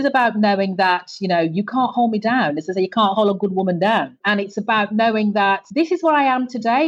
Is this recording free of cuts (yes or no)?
yes